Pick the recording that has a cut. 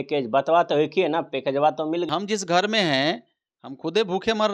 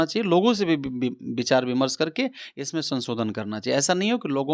first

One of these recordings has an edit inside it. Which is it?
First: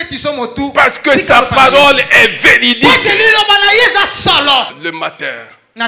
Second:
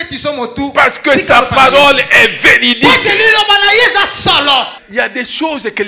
first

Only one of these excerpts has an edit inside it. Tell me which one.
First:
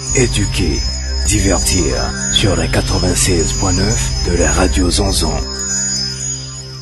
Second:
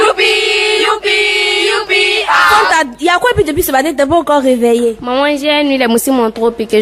second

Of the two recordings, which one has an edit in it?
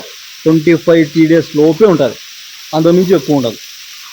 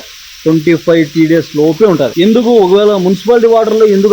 second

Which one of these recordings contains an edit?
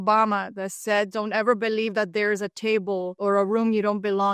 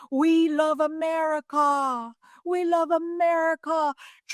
first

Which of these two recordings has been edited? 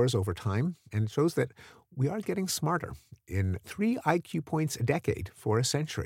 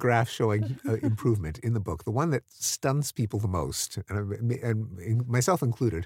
first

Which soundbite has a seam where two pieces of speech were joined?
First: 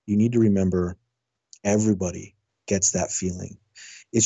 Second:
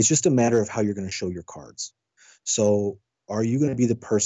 first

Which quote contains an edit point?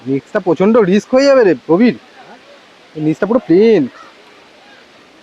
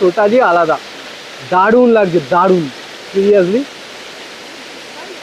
first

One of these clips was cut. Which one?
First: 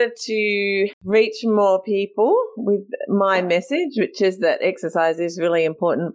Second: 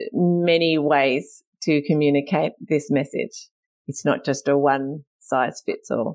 first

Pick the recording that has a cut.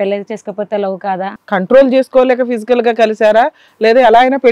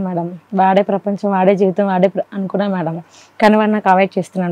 first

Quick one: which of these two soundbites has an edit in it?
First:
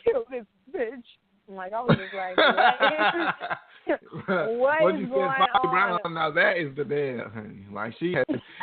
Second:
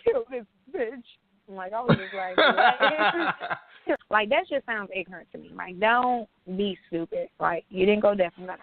second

